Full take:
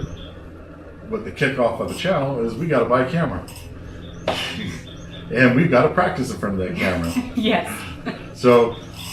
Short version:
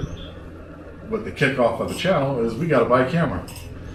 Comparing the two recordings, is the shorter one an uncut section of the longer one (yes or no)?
yes